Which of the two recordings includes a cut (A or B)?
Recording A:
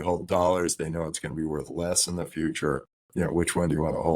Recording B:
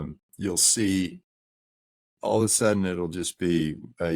A